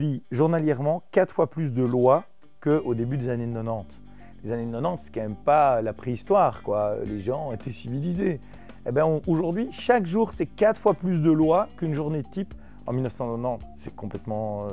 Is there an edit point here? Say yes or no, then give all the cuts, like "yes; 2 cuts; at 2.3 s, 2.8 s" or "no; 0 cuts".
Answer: no; 0 cuts